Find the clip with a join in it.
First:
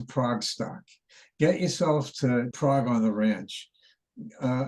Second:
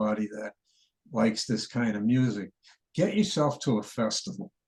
first; 1 cut; at 2.5 s

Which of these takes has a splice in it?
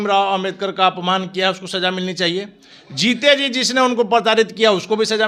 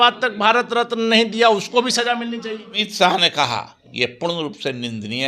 second; 1 cut; at 2.9 s

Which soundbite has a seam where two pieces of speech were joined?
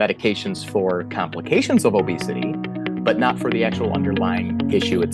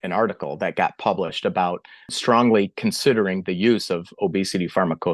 second; 1 cut; at 2.1 s

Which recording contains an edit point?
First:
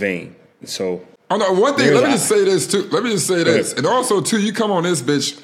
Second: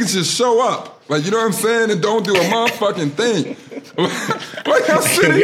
first; 1 cut; at 1.1 s

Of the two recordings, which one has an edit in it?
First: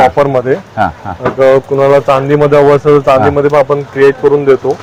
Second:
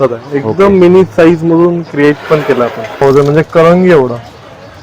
second; 1 cut; at 3.0 s

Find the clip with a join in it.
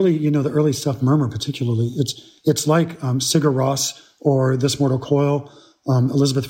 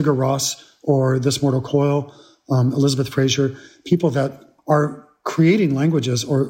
second; 1 cut; at 4.5 s

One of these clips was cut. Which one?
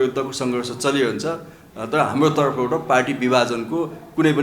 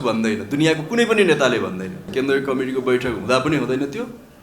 second; 1 cut; at 2.1 s

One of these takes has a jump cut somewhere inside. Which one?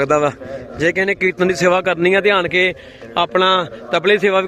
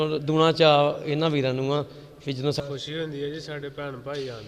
second; 1 cut; at 2.6 s

